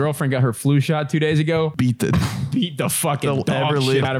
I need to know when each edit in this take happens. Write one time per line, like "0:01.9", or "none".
0:01.8